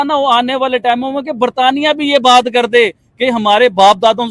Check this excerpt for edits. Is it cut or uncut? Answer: uncut